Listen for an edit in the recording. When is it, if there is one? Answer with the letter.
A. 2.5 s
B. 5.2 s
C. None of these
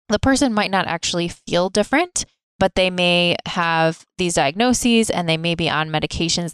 A